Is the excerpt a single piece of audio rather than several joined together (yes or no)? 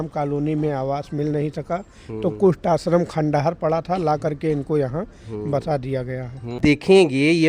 no